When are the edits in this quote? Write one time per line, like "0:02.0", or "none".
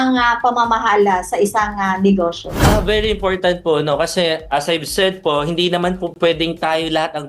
0:02.5

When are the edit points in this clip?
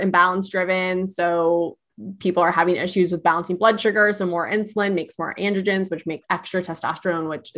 0:06.2

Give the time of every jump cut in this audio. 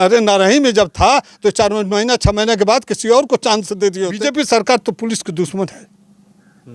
0:04.2

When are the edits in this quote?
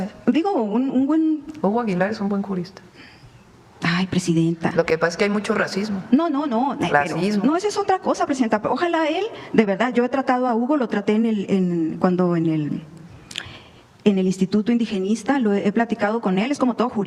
none

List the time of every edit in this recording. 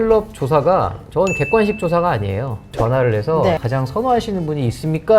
0:02.7
0:03.6

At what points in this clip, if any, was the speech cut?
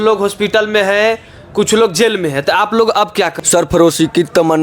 0:03.4

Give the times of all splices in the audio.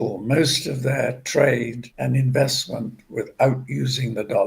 0:01.8

